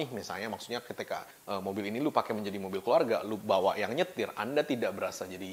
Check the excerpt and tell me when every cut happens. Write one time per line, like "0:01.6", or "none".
none